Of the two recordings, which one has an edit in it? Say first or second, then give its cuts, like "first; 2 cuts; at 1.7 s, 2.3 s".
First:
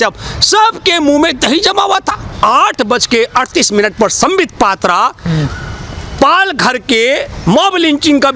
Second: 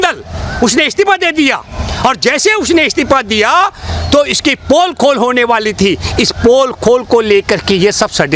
first; 1 cut; at 2.3 s